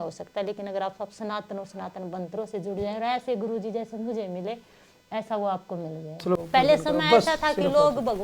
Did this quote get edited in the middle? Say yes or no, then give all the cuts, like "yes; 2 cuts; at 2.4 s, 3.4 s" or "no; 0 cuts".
yes; 1 cut; at 6.4 s